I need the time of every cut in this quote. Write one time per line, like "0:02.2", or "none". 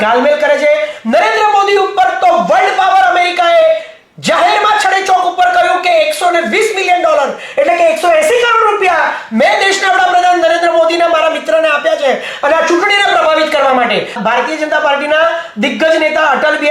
0:14.2